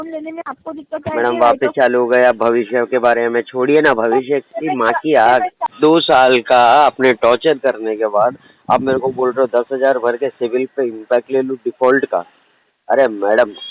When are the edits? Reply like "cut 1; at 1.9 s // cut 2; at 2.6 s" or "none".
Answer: cut 1; at 5.7 s